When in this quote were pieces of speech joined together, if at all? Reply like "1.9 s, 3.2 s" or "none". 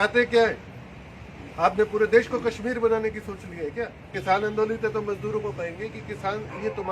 4.2 s